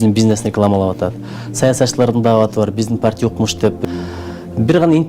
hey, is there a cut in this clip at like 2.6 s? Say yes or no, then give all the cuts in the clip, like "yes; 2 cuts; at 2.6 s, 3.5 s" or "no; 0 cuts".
no; 1 cut; at 3.8 s